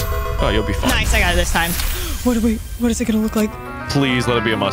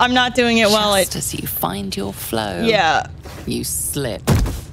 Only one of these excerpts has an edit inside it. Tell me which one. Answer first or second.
first